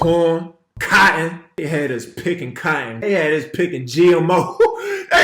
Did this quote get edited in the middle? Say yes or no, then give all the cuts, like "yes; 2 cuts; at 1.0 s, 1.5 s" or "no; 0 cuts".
yes; 2 cuts; at 0.8 s, 1.5 s